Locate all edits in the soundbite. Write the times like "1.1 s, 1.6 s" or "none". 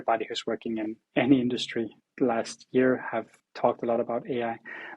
1.0 s, 2.0 s, 3.4 s